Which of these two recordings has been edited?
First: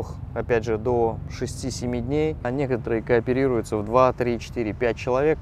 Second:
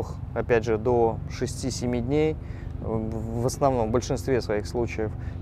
first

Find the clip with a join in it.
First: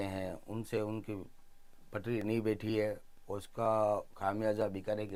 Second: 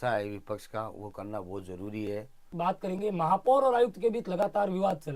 second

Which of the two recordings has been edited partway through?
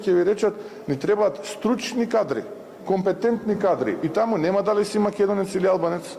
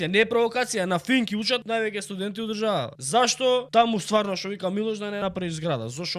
second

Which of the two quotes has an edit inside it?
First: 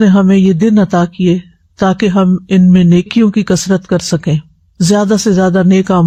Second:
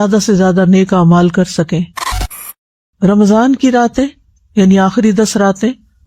second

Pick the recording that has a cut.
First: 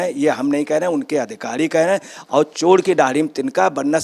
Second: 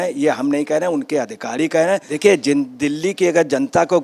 second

